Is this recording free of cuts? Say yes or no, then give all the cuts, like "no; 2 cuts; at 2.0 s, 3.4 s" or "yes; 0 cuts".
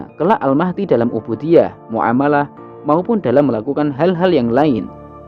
yes; 0 cuts